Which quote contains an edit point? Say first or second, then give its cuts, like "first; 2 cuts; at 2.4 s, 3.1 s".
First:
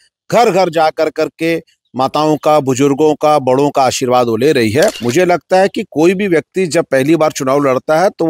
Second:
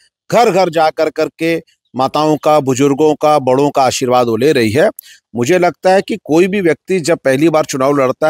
first; 1 cut; at 5.0 s